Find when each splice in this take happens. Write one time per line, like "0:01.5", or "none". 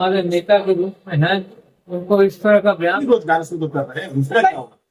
0:03.0